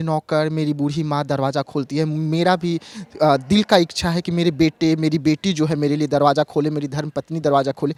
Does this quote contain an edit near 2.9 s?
no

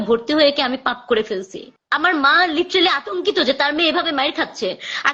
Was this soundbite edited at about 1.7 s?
yes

